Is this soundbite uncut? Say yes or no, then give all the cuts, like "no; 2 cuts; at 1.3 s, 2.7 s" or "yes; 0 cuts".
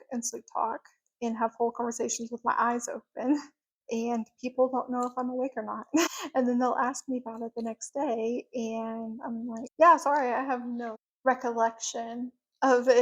yes; 0 cuts